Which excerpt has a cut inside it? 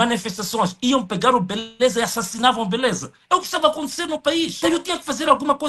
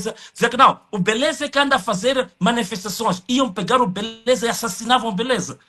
first; 1 cut; at 4.5 s

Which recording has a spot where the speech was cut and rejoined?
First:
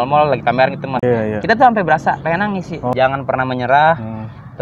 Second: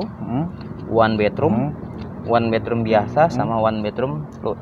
first; 2 cuts; at 1.0 s, 2.9 s

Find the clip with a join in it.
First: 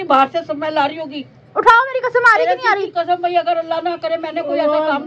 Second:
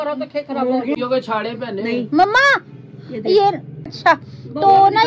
second; 2 cuts; at 1.0 s, 3.9 s

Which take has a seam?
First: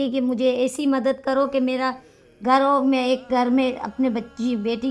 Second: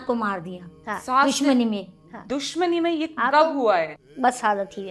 second; 1 cut; at 3.9 s

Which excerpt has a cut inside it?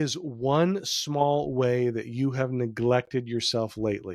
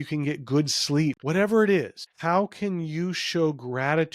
second; 2 cuts; at 1.2 s, 2.0 s

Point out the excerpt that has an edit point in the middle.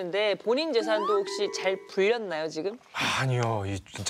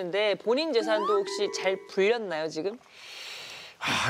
first; 1 cut; at 2.9 s

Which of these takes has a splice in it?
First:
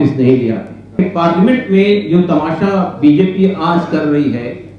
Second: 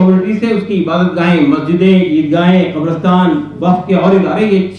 first; 1 cut; at 0.9 s

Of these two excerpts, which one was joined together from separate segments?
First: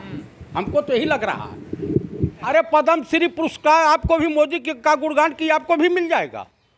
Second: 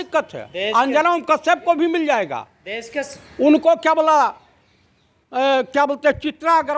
first; 1 cut; at 2.5 s

